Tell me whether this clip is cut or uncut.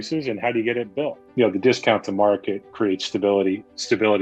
cut